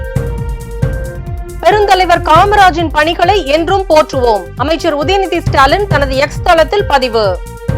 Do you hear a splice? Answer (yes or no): yes